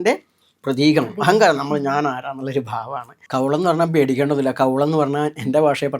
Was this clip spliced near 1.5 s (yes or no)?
no